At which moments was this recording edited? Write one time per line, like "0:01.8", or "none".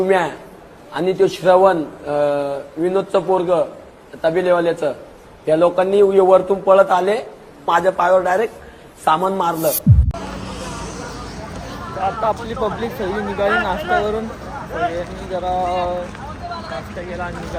none